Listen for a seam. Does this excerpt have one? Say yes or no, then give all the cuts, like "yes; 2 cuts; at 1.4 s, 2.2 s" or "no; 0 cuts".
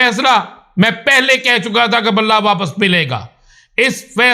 no; 0 cuts